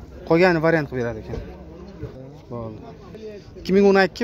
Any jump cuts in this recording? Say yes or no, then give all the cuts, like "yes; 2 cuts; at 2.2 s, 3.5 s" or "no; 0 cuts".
yes; 1 cut; at 2.1 s